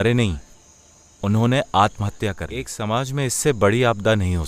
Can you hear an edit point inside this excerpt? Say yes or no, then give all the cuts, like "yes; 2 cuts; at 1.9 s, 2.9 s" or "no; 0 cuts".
yes; 1 cut; at 2.7 s